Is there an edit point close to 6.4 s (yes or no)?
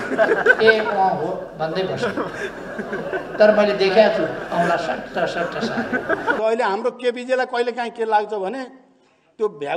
yes